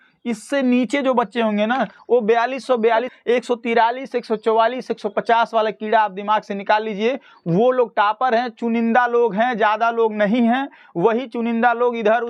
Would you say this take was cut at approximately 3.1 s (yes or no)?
yes